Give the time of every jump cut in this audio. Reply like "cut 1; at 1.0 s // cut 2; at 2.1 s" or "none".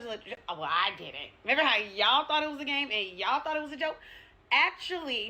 none